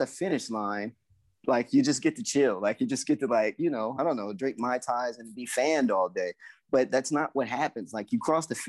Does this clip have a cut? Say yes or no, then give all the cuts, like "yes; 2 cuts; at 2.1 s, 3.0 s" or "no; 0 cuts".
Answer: no; 0 cuts